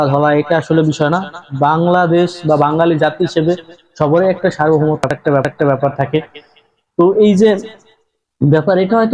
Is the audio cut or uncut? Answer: uncut